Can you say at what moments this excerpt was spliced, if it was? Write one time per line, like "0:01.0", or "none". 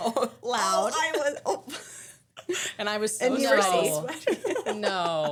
none

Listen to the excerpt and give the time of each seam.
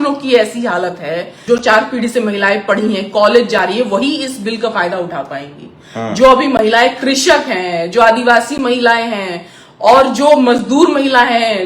0:01.3

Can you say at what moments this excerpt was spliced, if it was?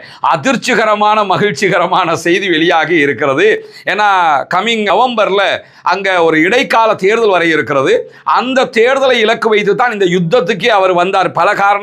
none

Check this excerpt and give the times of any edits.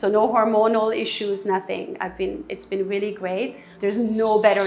0:03.7

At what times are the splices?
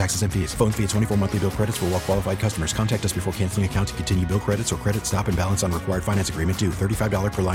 none

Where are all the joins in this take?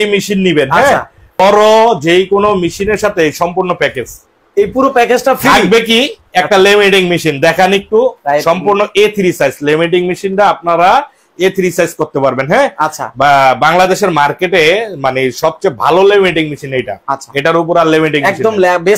0:01.4

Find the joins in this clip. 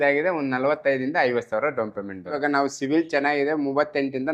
0:02.4

